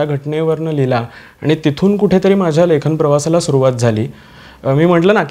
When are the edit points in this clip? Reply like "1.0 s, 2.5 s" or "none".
none